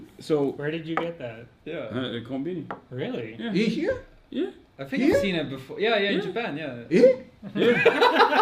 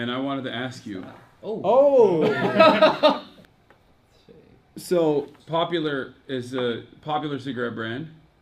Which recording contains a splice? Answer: second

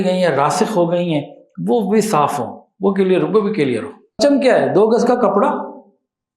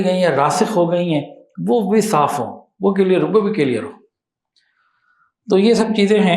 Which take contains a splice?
first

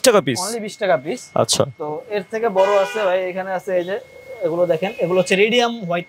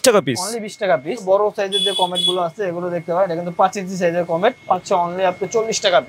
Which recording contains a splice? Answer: second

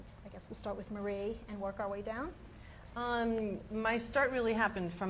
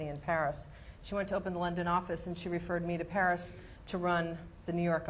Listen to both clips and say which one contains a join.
second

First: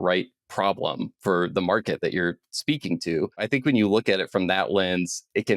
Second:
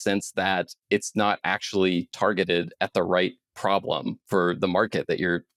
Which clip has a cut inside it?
first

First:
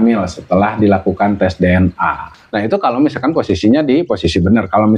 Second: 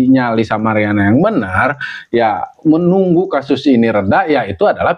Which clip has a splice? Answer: first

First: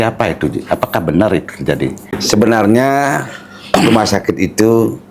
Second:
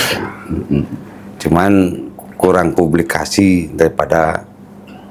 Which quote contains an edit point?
first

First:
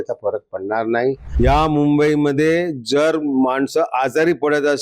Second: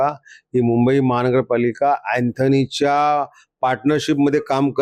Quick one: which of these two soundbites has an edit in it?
first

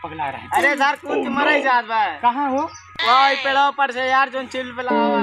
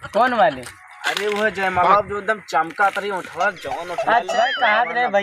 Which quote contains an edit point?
second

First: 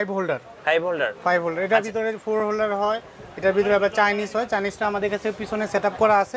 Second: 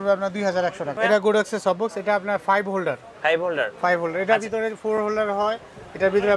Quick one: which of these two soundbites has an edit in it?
second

